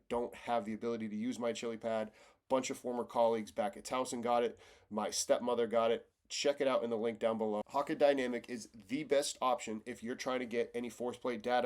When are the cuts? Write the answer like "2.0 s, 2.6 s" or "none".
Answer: 7.7 s